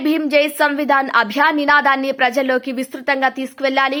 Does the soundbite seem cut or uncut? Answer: uncut